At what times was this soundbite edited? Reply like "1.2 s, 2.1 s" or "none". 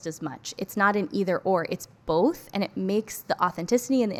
none